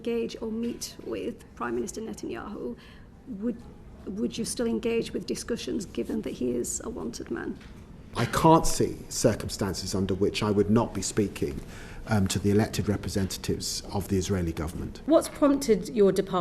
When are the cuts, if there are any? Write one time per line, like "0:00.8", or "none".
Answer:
0:08.2
0:14.9